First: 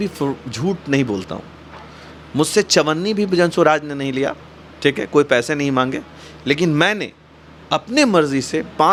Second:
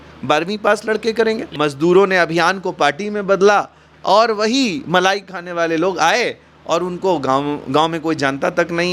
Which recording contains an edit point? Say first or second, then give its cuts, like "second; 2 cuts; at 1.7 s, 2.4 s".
second; 1 cut; at 1.5 s